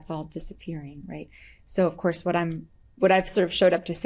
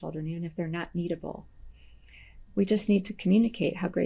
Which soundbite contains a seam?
second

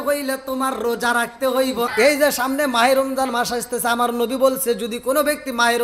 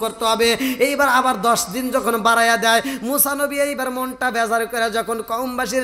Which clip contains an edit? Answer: first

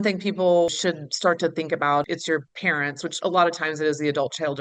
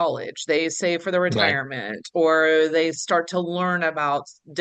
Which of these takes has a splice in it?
first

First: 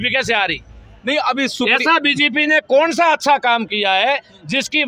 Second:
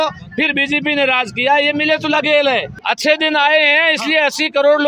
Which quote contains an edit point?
second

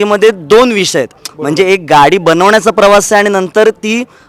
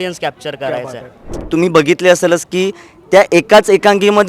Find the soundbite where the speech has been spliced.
second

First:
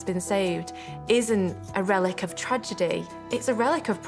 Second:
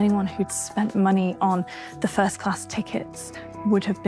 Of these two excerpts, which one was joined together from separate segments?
first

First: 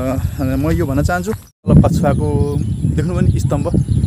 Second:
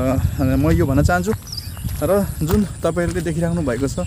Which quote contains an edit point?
first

